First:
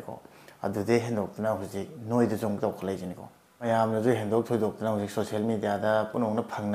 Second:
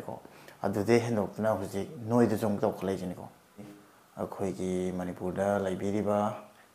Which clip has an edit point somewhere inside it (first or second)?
second